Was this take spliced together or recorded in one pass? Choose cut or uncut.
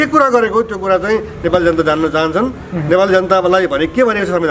uncut